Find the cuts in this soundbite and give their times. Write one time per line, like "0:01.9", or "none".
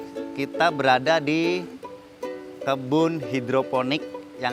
none